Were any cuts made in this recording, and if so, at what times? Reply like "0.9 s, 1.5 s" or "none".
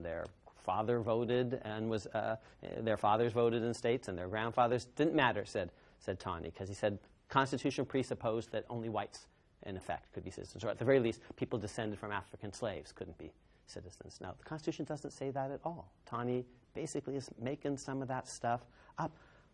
6.4 s

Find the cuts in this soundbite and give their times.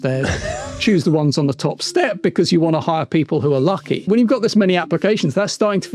4.0 s

